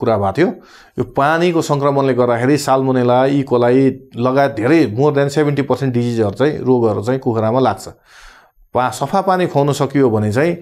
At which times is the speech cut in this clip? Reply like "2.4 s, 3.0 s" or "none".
none